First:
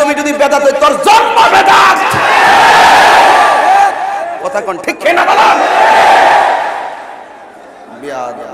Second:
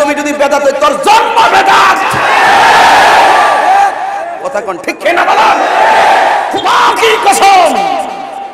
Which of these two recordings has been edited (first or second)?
second